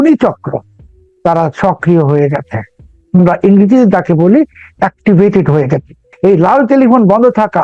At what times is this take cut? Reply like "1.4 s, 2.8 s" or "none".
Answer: 6.1 s